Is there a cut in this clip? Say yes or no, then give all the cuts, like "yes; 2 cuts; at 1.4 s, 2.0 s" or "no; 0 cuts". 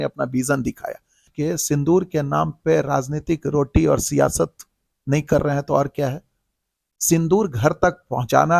yes; 1 cut; at 1.3 s